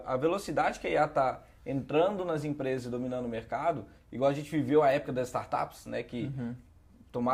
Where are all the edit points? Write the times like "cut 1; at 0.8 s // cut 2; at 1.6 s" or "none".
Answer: none

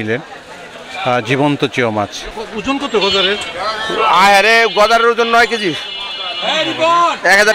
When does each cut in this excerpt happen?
cut 1; at 2.3 s

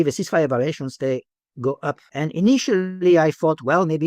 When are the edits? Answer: cut 1; at 2.0 s

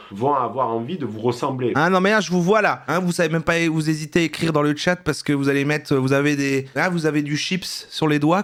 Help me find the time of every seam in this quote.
none

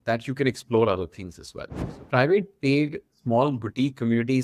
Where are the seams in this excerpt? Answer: cut 1; at 1.8 s

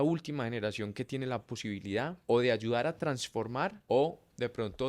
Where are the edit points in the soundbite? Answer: cut 1; at 2.2 s // cut 2; at 3.8 s

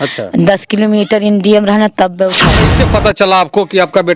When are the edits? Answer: cut 1; at 2.7 s

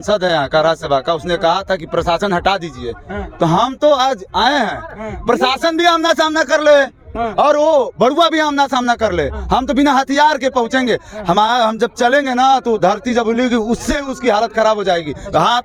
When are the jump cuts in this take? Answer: none

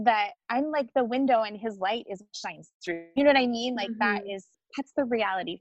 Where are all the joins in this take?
cut 1; at 4.6 s

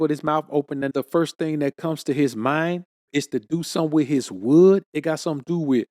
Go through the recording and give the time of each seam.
cut 1; at 2.9 s

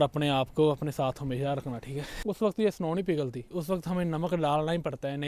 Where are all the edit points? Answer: cut 1; at 2.1 s

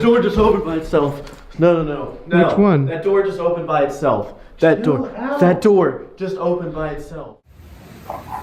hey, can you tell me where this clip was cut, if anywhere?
cut 1; at 7.1 s

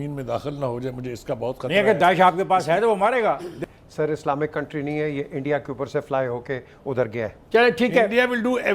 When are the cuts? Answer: cut 1; at 3.6 s

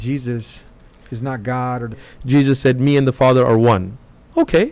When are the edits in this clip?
cut 1; at 2.1 s

